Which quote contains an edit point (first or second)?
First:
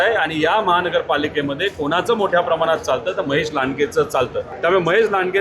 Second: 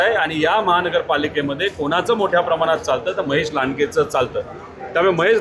first